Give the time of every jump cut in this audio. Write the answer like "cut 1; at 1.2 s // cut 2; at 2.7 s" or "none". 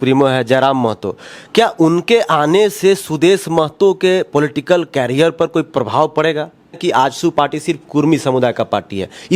cut 1; at 6.8 s